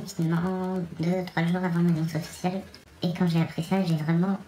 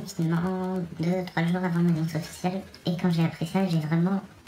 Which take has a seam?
second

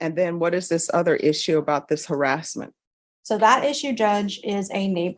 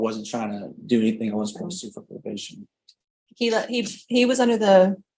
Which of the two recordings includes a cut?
first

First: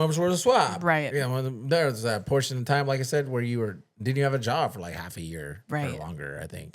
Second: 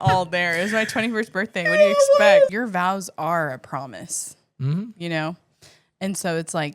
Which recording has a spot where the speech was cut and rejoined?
second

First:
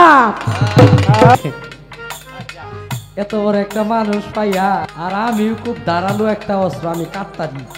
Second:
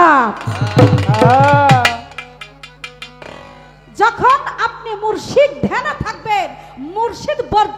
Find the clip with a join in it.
first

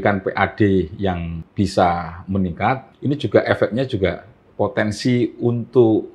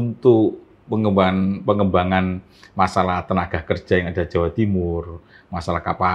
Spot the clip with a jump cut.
first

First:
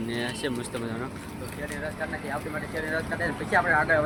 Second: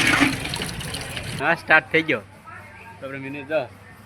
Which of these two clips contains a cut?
second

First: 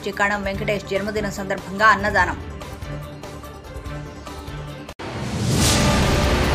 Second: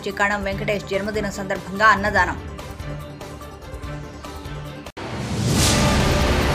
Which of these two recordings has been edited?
second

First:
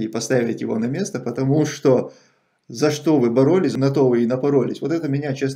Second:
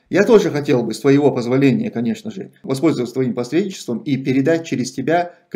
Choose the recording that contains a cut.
first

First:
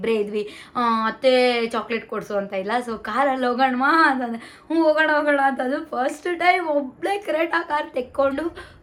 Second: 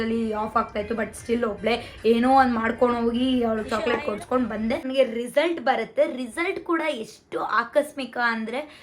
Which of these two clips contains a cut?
second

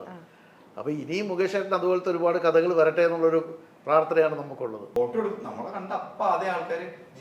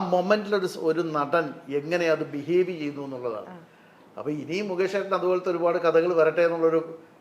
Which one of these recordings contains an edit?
first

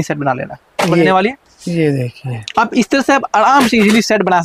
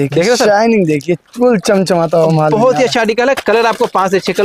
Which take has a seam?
first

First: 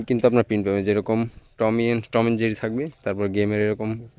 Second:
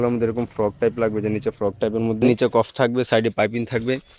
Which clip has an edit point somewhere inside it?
second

